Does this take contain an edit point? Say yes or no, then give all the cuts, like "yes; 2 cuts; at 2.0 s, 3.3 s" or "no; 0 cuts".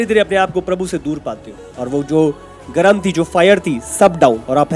yes; 1 cut; at 1.7 s